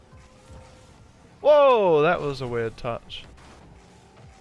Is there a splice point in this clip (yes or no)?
no